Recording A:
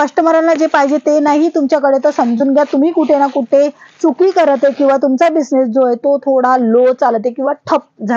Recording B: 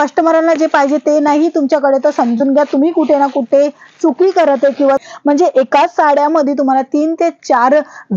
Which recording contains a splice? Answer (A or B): B